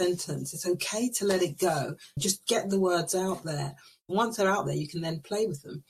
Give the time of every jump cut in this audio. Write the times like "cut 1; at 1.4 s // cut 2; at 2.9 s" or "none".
cut 1; at 2.2 s